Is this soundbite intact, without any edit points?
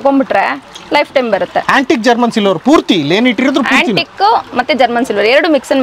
yes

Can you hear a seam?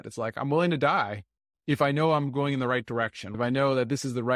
yes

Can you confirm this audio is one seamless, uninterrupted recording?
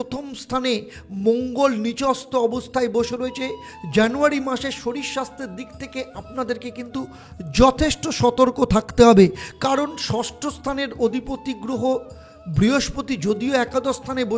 yes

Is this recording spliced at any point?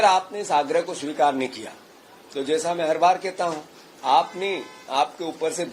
no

